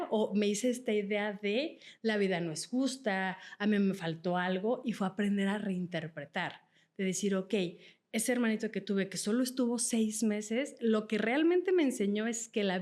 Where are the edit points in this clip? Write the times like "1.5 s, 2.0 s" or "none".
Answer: none